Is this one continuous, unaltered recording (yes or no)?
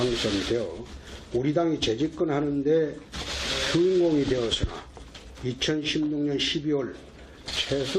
no